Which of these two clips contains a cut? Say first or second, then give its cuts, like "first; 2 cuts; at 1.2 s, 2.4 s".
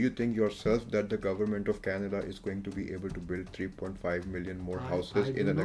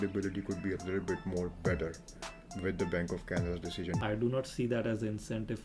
second; 1 cut; at 4.0 s